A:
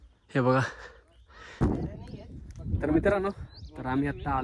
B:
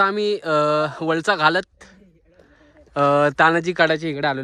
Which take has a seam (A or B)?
A